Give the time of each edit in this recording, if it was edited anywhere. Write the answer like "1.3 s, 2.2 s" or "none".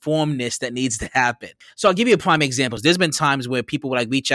1.6 s, 2.7 s